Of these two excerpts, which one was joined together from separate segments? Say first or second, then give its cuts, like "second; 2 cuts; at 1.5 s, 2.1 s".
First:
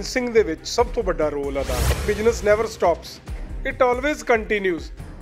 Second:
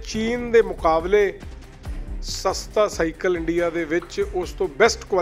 first; 1 cut; at 2.0 s